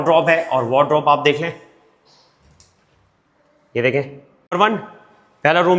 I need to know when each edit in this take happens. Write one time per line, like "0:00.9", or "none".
0:04.5

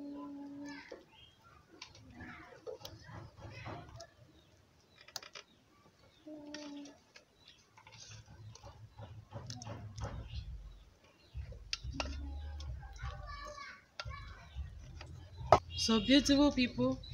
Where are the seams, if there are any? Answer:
0:15.7

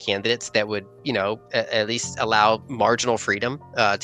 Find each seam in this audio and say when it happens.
0:02.7

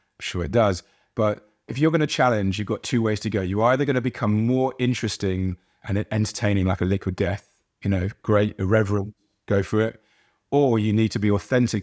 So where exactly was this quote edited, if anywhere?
0:01.7

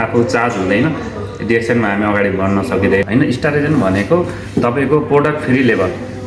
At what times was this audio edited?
0:03.0

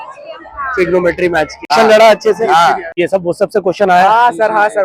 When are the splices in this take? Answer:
0:01.7
0:02.9

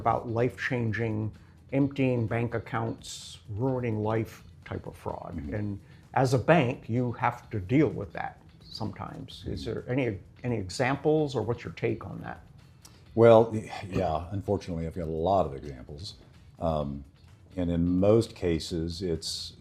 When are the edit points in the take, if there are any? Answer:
none

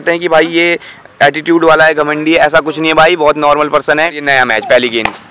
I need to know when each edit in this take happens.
0:04.2

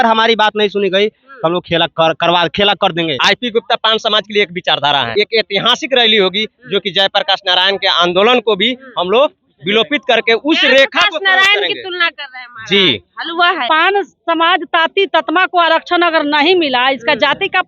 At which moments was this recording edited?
0:03.2
0:05.1
0:13.6

